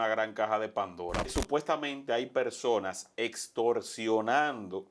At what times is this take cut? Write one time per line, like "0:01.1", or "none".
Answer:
0:01.3